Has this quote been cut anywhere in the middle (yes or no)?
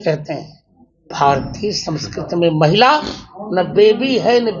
yes